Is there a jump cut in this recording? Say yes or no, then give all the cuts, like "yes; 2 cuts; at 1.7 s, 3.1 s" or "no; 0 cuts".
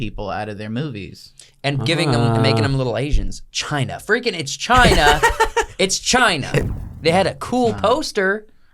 yes; 1 cut; at 6.6 s